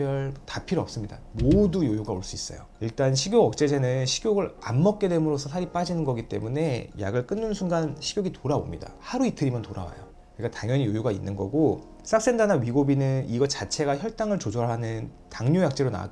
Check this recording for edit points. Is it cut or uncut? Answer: uncut